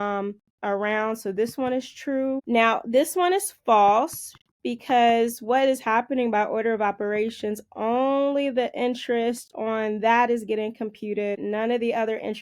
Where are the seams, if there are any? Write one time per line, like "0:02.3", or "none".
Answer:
0:02.4
0:11.4